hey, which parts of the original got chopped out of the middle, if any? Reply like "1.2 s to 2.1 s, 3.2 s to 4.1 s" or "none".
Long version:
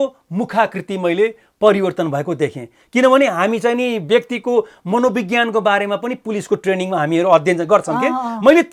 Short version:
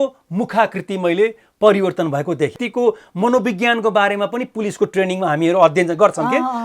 2.6 s to 4.3 s